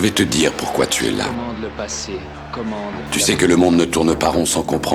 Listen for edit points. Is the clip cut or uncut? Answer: uncut